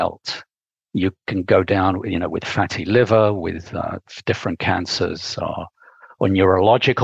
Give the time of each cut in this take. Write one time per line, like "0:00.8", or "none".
none

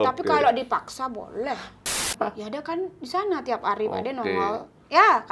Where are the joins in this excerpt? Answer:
0:02.1

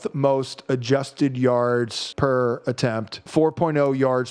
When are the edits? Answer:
0:02.0
0:03.2

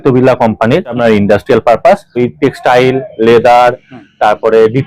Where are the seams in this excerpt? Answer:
0:01.0
0:02.1

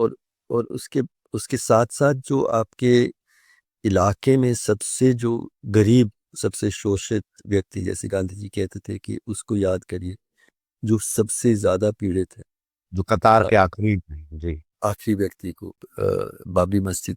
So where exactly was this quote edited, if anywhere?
0:15.9

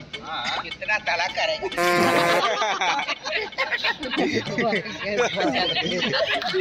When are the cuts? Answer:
none

